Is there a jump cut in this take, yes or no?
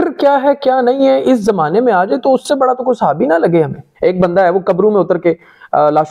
yes